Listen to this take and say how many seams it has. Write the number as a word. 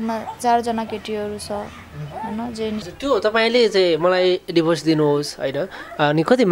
one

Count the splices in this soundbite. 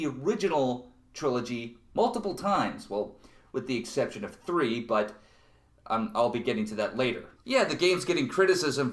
zero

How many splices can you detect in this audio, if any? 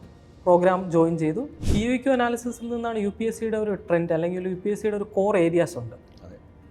one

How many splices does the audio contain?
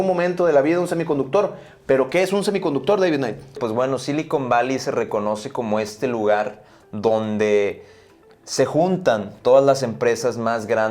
one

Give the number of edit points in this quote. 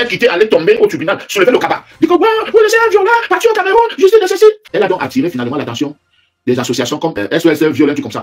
two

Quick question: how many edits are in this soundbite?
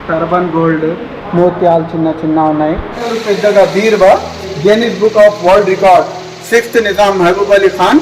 one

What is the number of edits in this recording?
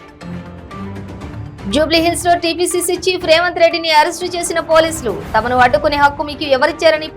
zero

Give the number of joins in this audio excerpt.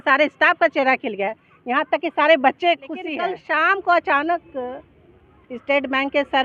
one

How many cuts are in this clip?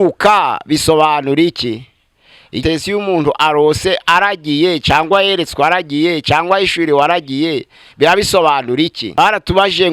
two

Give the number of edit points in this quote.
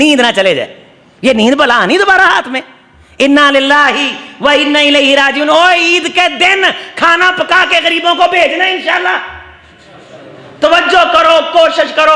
zero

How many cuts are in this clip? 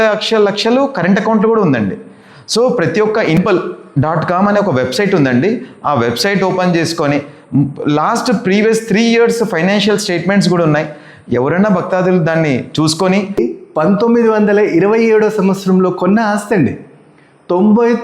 two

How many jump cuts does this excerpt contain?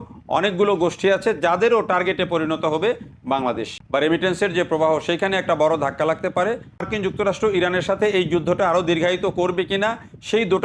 two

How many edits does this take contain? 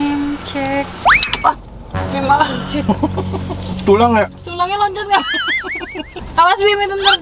one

